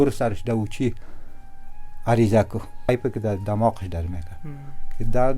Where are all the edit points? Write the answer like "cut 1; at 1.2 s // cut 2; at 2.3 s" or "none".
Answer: cut 1; at 2.9 s